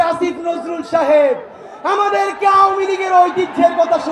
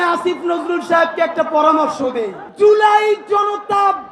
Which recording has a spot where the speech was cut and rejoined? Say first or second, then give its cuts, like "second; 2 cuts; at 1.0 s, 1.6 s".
second; 1 cut; at 2.4 s